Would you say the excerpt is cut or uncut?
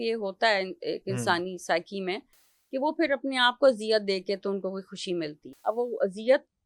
cut